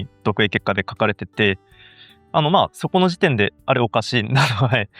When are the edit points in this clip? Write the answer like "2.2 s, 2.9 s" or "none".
none